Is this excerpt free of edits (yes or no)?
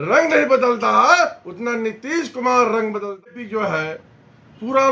no